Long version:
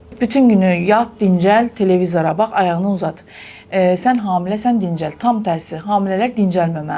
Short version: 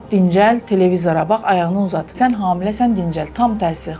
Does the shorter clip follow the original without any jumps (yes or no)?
no